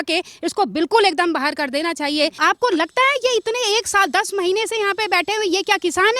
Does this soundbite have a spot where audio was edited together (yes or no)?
yes